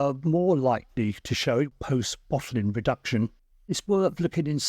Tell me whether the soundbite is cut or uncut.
cut